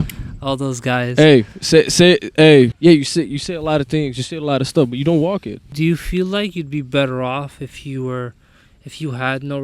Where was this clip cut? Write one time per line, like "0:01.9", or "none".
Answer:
0:02.7
0:05.7